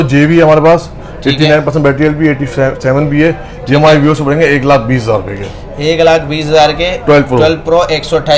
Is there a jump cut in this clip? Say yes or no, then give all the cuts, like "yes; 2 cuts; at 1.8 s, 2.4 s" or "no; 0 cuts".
no; 0 cuts